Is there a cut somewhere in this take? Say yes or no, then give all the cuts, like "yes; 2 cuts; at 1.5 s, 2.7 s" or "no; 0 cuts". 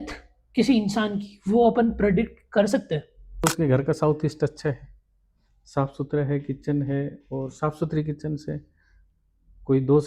yes; 1 cut; at 3.4 s